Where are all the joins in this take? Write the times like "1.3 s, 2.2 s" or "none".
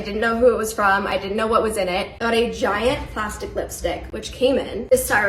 2.2 s